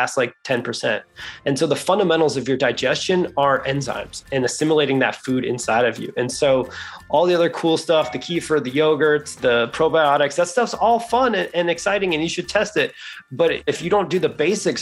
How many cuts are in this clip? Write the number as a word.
two